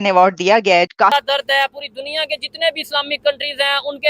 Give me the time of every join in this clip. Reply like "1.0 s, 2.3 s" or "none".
1.1 s